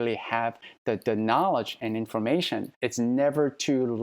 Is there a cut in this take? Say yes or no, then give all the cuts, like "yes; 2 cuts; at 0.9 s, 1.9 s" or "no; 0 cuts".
yes; 1 cut; at 2.8 s